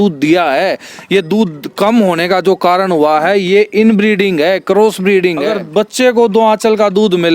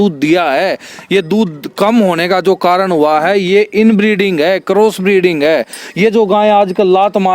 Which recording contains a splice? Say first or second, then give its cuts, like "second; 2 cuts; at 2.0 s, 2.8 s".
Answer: first; 1 cut; at 5.5 s